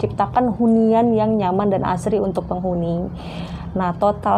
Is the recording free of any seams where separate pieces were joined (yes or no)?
yes